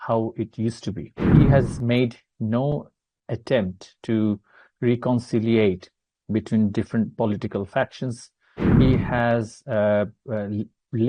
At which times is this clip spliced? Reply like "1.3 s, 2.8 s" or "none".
1.3 s